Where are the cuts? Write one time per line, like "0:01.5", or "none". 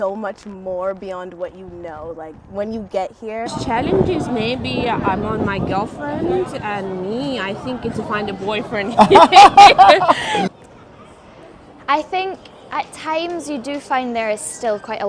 0:03.4
0:10.5